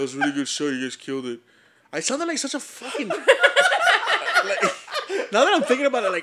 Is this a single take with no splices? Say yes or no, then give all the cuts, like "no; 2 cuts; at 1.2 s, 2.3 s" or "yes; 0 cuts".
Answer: yes; 0 cuts